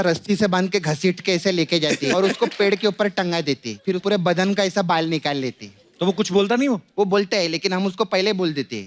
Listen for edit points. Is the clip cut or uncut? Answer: cut